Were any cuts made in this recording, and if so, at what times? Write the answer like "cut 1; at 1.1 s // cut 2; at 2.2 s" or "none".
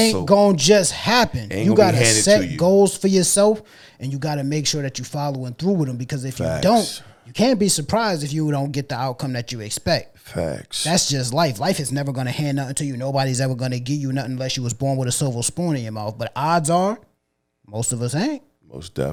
none